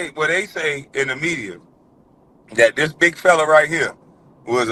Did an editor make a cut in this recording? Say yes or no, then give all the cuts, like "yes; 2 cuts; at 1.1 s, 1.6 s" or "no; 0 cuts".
no; 0 cuts